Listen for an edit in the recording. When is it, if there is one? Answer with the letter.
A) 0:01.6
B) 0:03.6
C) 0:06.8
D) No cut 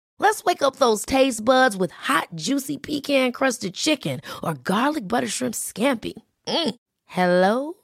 D